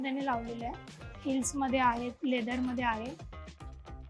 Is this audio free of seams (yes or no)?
no